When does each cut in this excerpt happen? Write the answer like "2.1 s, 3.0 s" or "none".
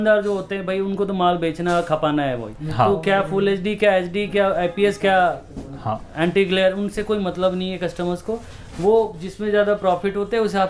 none

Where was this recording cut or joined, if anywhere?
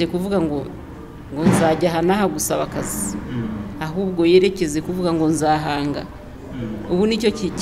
none

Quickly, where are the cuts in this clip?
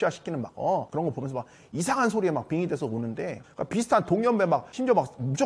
3.4 s

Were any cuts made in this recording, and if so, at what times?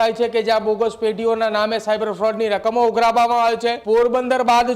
3.8 s

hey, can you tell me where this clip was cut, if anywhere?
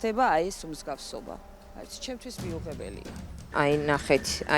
3.4 s

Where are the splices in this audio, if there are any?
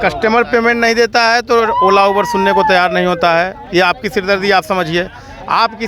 none

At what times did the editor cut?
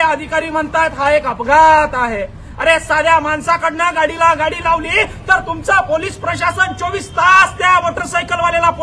none

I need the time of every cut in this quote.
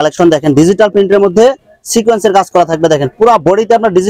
none

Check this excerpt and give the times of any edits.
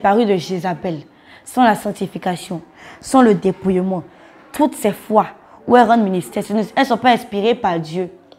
none

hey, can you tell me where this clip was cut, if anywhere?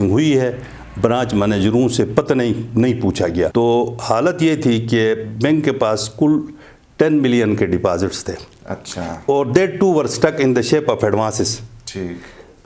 3.5 s

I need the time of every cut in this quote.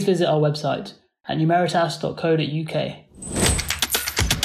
3.0 s

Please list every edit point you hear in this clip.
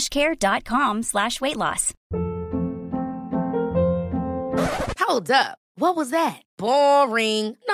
1.9 s

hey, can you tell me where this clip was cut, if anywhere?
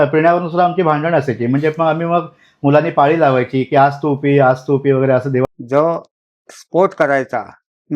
5.4 s

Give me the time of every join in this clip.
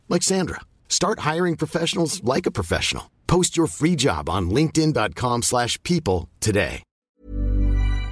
6.9 s

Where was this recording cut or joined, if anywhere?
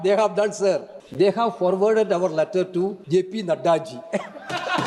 1.0 s, 3.0 s

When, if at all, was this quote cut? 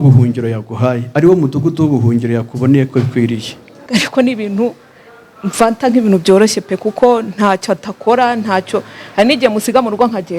3.8 s

